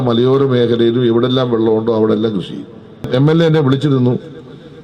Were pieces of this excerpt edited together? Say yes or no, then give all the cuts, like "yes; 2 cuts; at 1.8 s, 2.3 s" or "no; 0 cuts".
yes; 1 cut; at 3.1 s